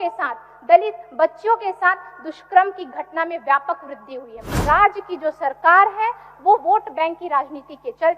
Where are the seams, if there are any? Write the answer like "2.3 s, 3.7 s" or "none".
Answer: 4.5 s